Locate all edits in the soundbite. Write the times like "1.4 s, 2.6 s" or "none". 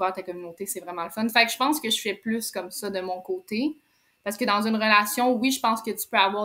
none